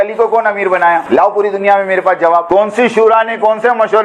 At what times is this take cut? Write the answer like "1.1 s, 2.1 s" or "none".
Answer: 1.0 s, 2.5 s